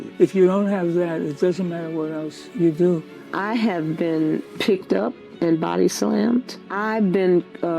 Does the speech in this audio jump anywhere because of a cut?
yes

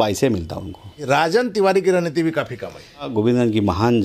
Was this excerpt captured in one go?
no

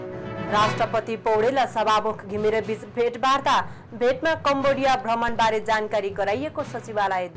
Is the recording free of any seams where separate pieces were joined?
yes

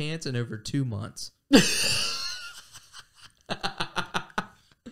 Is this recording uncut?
yes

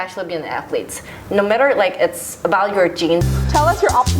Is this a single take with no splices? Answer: no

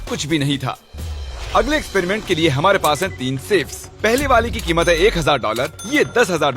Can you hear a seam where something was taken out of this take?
no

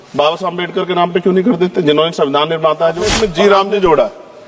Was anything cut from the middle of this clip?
yes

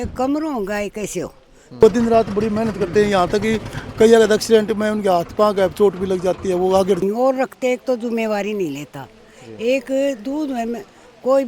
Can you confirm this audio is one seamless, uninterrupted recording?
no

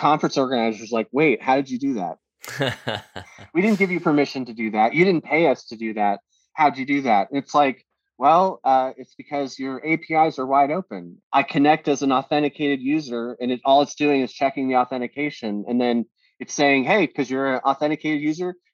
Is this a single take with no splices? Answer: yes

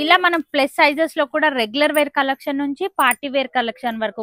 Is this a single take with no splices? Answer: yes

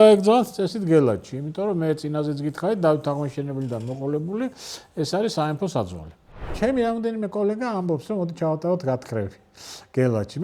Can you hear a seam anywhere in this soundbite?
yes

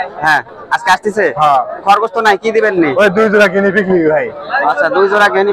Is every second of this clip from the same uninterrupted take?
yes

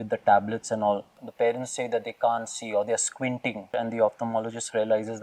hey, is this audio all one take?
no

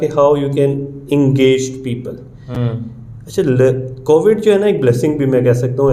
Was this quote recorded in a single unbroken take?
yes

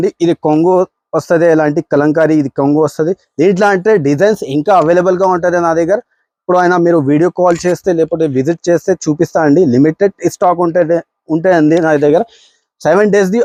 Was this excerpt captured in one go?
yes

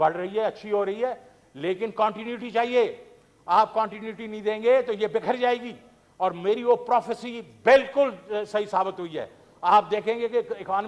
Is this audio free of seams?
yes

